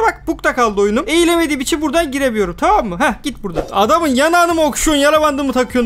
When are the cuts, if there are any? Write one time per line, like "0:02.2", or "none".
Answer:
0:03.6